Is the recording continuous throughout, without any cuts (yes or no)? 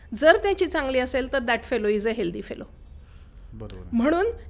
yes